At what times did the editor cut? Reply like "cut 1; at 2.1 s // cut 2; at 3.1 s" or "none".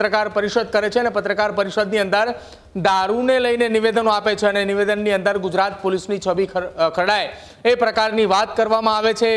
none

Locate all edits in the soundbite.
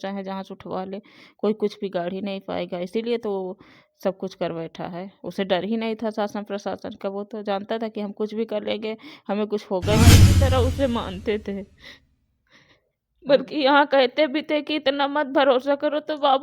cut 1; at 10.3 s

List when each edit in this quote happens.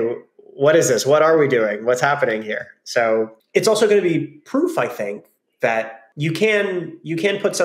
cut 1; at 3.4 s // cut 2; at 6.0 s

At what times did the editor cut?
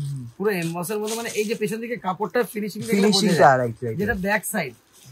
none

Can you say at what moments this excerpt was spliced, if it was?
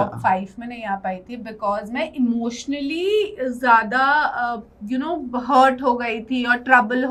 none

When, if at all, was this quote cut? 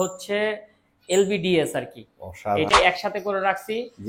cut 1; at 2.7 s

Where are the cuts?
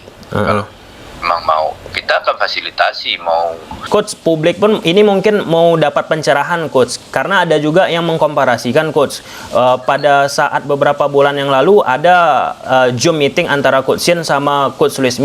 cut 1; at 3.8 s

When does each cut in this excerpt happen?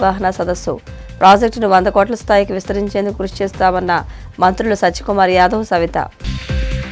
none

